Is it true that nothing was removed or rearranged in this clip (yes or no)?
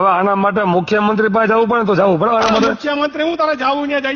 yes